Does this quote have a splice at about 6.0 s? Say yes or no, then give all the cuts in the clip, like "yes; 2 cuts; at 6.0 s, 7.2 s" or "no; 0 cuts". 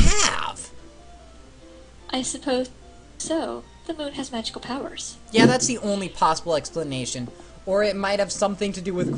yes; 1 cut; at 6.0 s